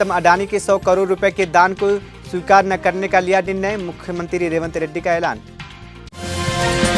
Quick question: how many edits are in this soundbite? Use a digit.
0